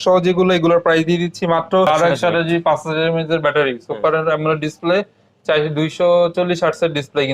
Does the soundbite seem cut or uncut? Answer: cut